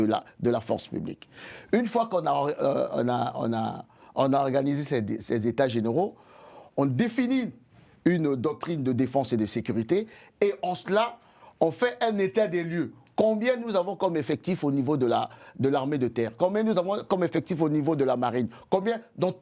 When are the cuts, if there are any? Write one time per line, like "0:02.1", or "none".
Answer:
none